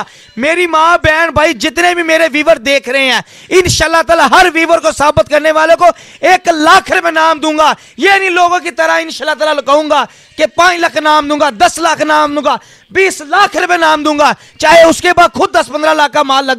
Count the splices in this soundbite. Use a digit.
0